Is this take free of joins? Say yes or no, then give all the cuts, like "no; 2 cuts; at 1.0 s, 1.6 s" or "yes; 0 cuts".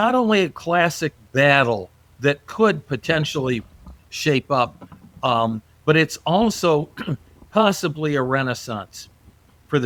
yes; 0 cuts